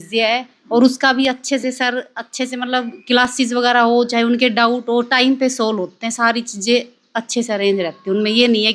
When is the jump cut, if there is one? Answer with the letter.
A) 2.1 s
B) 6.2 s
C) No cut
C